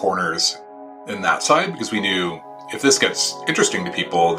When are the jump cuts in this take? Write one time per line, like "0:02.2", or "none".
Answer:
0:01.0